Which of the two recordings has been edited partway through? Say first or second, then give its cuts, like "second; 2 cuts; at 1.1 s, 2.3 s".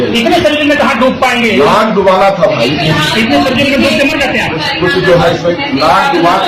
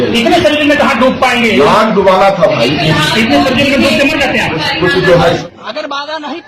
second; 1 cut; at 5.4 s